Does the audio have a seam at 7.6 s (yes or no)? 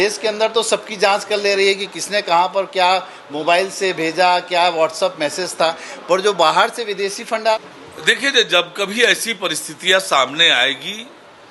yes